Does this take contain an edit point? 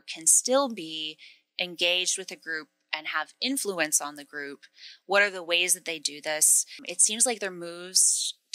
yes; 1 cut; at 6.9 s

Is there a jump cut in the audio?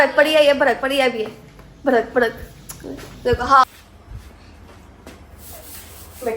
yes; 1 cut; at 3.6 s

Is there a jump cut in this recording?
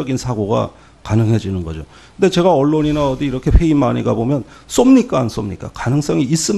no; 0 cuts

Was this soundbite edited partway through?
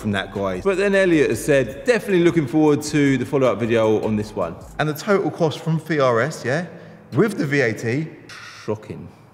yes; 2 cuts; at 4.6 s, 8.2 s

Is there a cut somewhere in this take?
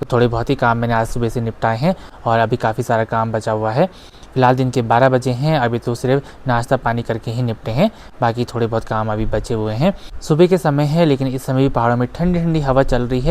no; 0 cuts

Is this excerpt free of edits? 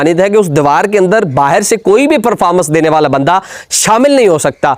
yes; 0 cuts

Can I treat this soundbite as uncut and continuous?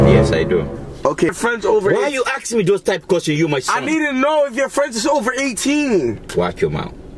no; 2 cuts; at 1.3 s, 6.2 s

